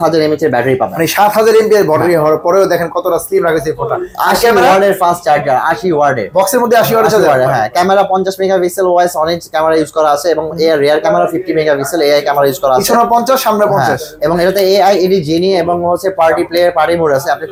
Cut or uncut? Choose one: uncut